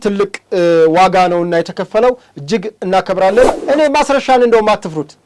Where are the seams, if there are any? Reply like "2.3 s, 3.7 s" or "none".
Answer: 3.6 s